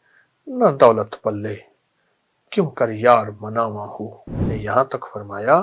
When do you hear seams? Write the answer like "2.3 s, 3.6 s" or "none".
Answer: 4.5 s

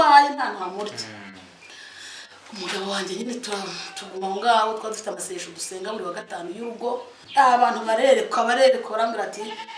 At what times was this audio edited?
7.2 s

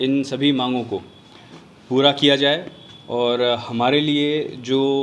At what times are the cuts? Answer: none

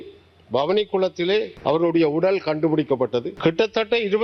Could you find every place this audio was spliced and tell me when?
1.5 s, 3.3 s

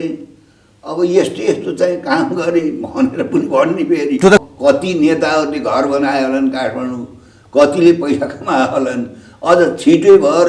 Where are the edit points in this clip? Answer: 4.4 s

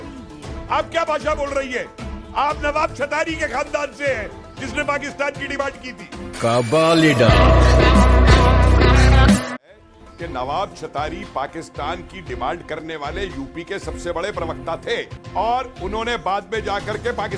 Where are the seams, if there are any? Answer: 9.7 s

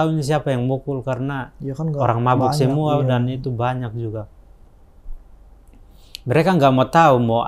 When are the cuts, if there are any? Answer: none

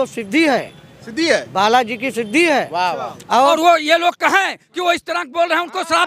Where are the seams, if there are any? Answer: 3.5 s

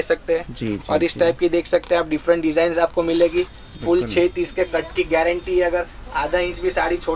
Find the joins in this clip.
none

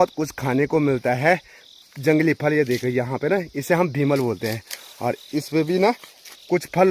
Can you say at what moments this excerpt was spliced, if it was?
none

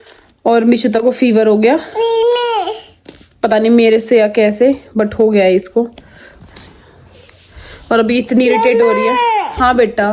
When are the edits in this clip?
none

